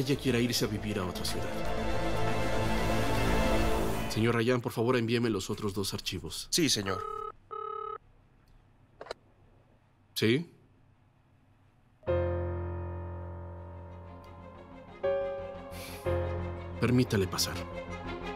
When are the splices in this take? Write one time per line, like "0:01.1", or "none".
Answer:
0:04.0